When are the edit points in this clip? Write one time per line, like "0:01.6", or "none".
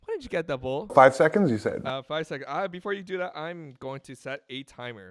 none